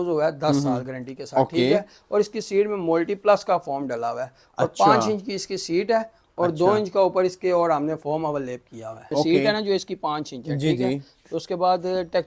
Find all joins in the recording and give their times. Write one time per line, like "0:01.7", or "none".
0:09.0